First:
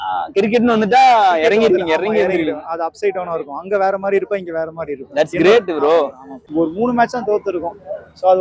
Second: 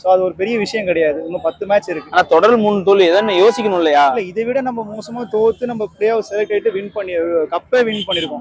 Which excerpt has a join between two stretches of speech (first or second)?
first